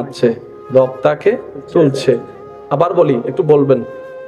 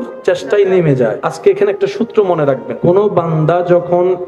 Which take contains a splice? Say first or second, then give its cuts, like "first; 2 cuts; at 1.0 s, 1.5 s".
second; 2 cuts; at 1.3 s, 2.7 s